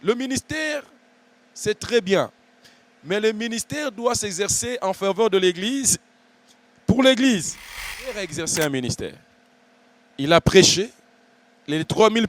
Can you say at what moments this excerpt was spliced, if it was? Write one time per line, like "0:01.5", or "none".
0:08.1